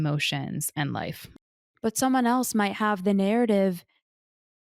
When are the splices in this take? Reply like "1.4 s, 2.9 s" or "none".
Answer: 1.3 s